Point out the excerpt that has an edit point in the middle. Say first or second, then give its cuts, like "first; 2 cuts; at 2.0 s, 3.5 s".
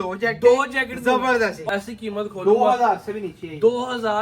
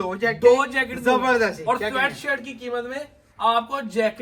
first; 1 cut; at 1.6 s